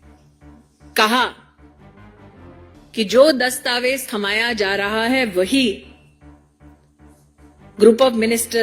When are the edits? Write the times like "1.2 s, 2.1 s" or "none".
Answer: 1.4 s, 2.9 s, 5.9 s, 7.5 s